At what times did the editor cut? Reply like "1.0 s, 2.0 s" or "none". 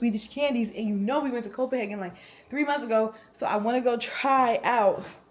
none